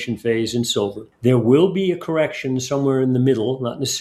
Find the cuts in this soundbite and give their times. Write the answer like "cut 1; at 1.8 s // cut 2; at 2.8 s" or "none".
cut 1; at 1.1 s